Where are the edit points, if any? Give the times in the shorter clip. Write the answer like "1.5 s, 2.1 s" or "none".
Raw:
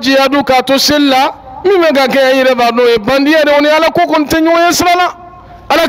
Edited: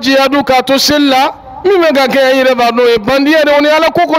none